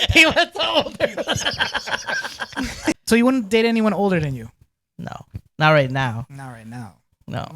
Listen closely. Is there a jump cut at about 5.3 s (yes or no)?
no